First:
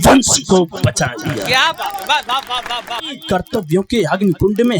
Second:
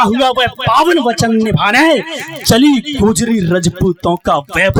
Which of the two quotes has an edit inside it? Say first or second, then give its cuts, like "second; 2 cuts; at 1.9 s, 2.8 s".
first; 1 cut; at 3.1 s